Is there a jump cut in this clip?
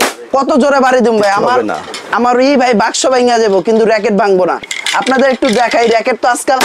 yes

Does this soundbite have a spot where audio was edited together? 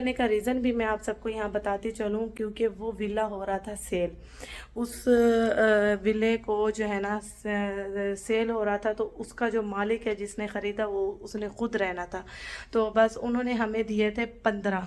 no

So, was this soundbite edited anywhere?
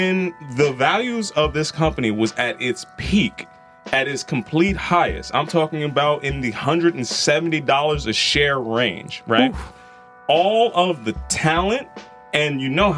no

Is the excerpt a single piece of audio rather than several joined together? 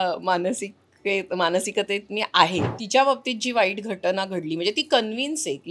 no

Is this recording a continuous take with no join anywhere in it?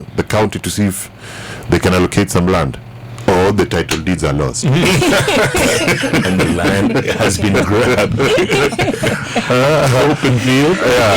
yes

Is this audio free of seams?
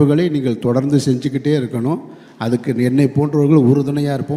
yes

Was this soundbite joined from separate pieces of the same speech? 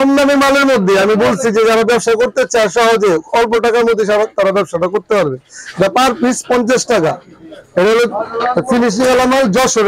no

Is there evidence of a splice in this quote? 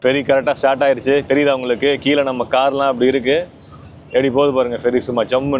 no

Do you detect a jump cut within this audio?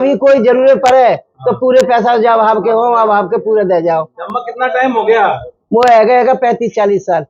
no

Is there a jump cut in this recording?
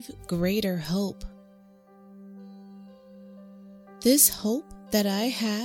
yes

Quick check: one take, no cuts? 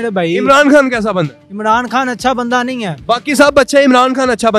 yes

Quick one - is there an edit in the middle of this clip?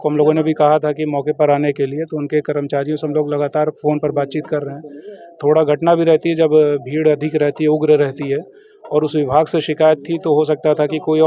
no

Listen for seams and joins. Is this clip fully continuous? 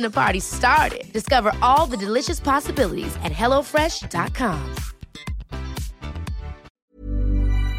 no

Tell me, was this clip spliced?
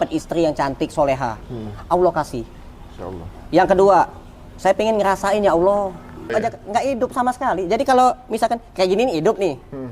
yes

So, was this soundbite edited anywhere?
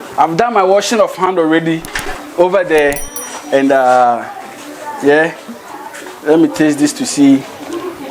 no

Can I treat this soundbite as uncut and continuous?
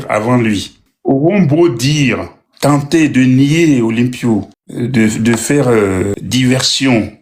no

